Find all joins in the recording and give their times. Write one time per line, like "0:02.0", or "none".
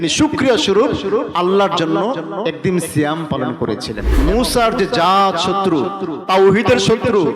0:04.2